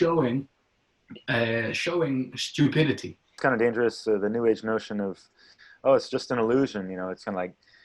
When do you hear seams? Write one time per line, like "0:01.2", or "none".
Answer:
0:03.4